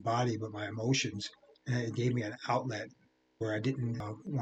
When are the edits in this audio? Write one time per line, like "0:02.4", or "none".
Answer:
none